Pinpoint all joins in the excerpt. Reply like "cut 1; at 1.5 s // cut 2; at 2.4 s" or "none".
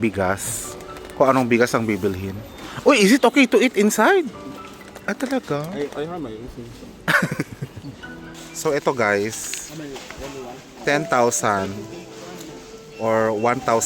cut 1; at 8.5 s